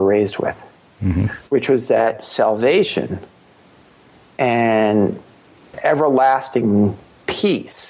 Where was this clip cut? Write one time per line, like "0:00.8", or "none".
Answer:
0:05.8